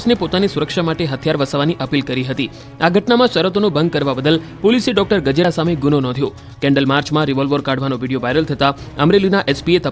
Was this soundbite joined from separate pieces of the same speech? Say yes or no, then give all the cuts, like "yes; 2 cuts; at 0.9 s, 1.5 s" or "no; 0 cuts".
no; 0 cuts